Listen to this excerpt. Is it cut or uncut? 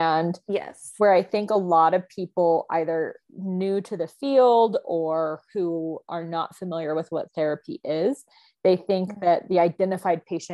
uncut